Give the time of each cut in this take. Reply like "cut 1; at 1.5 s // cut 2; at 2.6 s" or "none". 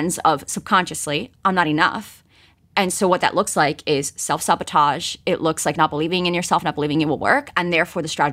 none

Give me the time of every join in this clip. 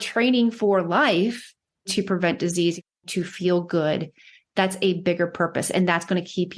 cut 1; at 1.9 s // cut 2; at 3.0 s

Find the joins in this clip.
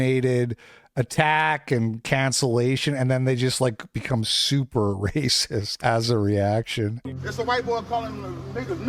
cut 1; at 5.8 s // cut 2; at 7.0 s

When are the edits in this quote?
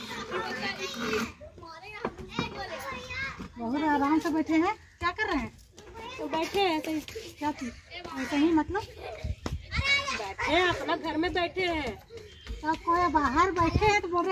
none

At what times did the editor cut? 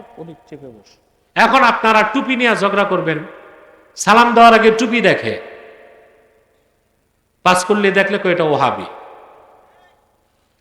none

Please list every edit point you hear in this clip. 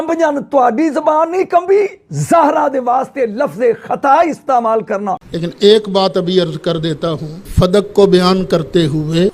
cut 1; at 5.2 s

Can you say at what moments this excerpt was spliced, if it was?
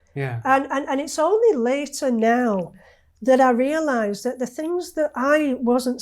none

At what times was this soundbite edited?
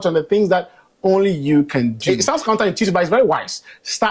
cut 1; at 2.3 s

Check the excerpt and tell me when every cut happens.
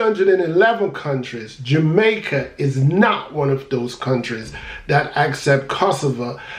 none

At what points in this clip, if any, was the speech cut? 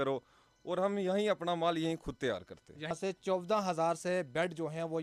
cut 1; at 2.9 s

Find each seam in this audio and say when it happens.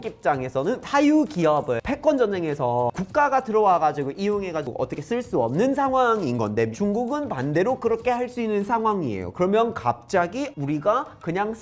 cut 1; at 6.7 s

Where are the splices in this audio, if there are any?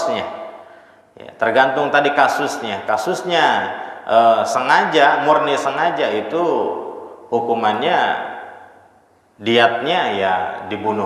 none

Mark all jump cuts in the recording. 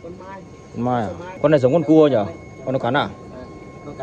cut 1; at 1.2 s

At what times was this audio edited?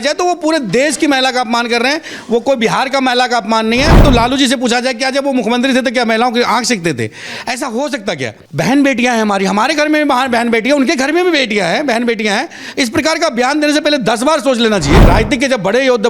cut 1; at 4.0 s // cut 2; at 8.4 s // cut 3; at 15.0 s

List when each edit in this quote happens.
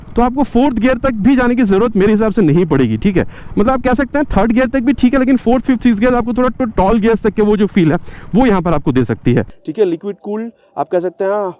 cut 1; at 9.6 s

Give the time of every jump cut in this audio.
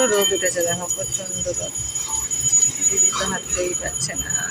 none

